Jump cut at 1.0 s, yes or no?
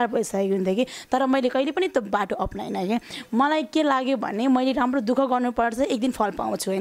no